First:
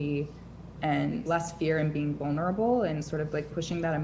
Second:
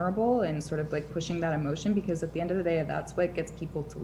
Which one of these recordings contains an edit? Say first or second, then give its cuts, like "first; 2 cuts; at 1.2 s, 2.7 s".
first; 1 cut; at 1.2 s